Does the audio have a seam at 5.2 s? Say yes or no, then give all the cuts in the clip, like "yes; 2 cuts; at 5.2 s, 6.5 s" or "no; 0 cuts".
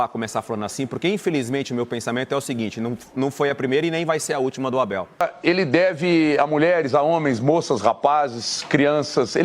yes; 1 cut; at 5.2 s